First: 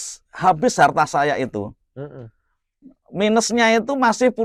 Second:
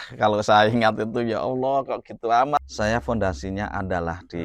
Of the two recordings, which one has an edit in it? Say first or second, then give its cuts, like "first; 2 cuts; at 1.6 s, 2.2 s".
second; 1 cut; at 2.6 s